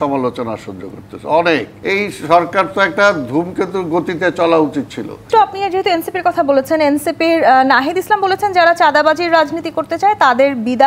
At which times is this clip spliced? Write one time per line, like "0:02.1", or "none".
0:01.7
0:05.2